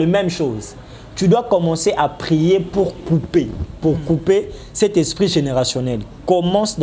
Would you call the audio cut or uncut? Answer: uncut